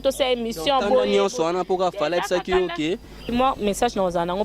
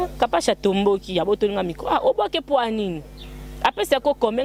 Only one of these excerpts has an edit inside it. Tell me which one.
first; 1 cut; at 3.3 s

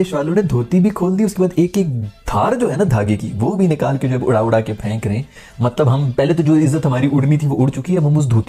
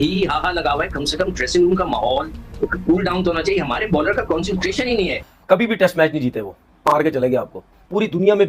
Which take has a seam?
second; 1 cut; at 5.2 s

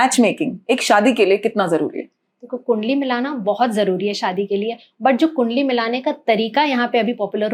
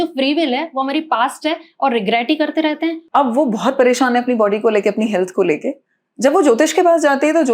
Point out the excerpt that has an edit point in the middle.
second; 1 cut; at 3.0 s

